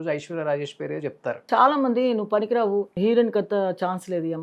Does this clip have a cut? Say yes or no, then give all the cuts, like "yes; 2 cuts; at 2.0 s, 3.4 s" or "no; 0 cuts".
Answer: yes; 2 cuts; at 1.4 s, 2.9 s